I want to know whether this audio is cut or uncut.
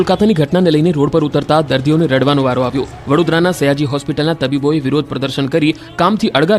uncut